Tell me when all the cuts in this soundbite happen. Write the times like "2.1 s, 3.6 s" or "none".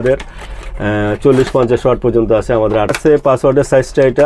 3.0 s